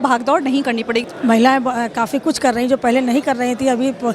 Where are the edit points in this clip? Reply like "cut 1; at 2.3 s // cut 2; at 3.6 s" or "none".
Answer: cut 1; at 1.1 s